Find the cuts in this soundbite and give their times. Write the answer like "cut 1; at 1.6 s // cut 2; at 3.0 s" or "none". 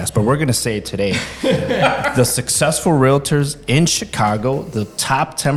none

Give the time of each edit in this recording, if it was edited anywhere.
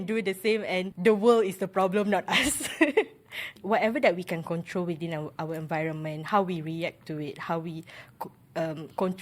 cut 1; at 0.9 s // cut 2; at 3.5 s

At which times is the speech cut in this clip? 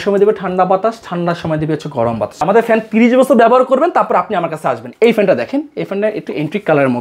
cut 1; at 2.4 s // cut 2; at 4.9 s

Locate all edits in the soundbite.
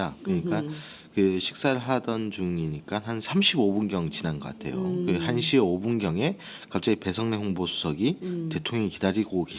cut 1; at 2.1 s

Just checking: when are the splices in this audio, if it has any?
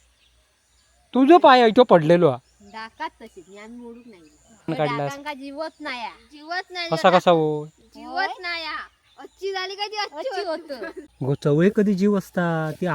cut 1; at 4.7 s // cut 2; at 11.0 s

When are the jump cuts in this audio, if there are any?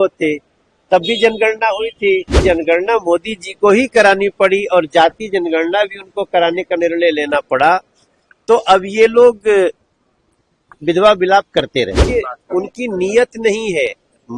cut 1; at 2.4 s // cut 2; at 12.0 s

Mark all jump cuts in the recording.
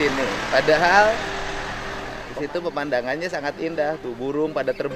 none

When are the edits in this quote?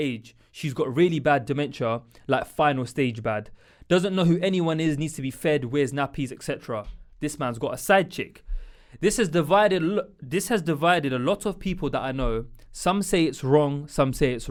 none

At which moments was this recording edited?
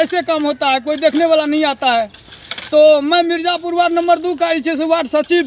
none

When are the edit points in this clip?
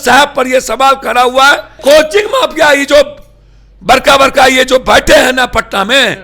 cut 1; at 1.8 s

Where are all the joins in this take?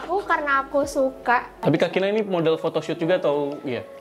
cut 1; at 1.5 s

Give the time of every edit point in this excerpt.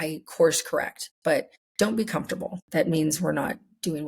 cut 1; at 1.6 s // cut 2; at 2.6 s

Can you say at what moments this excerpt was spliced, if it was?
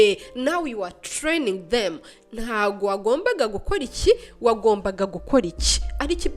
none

